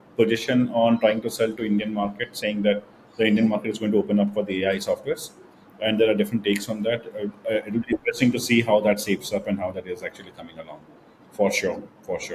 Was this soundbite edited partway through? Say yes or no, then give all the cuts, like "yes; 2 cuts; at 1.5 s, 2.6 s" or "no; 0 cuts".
no; 0 cuts